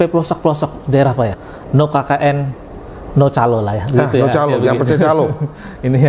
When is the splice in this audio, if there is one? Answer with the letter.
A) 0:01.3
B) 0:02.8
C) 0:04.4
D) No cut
A